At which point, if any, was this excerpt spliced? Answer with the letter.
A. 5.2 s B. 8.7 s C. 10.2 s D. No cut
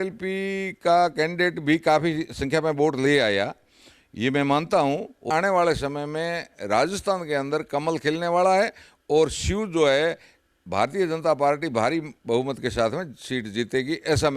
A